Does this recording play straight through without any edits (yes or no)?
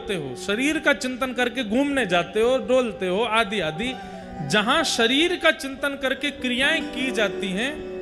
yes